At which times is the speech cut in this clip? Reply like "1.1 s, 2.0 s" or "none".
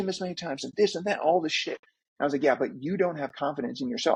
none